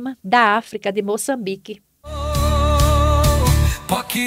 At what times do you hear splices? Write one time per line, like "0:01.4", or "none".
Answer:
0:02.2